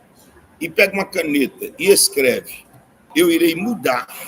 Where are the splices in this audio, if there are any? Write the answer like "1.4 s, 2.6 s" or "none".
3.0 s